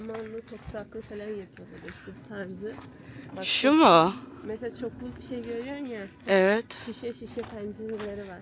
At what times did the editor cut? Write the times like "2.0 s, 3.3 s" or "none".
2.1 s